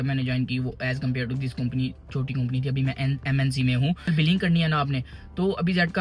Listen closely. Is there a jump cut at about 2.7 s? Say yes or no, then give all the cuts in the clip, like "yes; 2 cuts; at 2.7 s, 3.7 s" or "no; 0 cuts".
no; 1 cut; at 4.1 s